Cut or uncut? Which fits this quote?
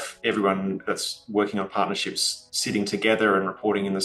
uncut